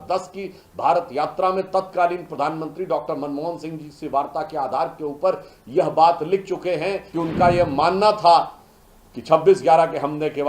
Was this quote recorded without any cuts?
no; 1 cut; at 7.1 s

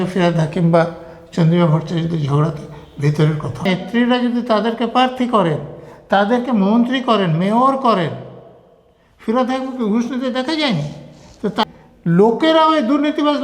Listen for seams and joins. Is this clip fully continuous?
no; 2 cuts; at 3.7 s, 11.6 s

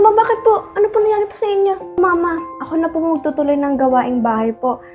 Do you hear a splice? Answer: yes; 1 cut; at 2.0 s

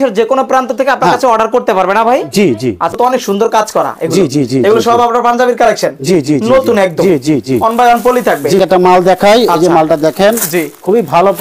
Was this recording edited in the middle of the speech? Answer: yes; 2 cuts; at 2.9 s, 8.6 s

